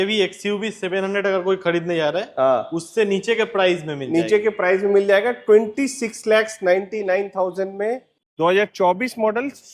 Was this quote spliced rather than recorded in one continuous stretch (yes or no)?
yes